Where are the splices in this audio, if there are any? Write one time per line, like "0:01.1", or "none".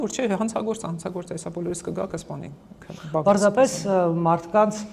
none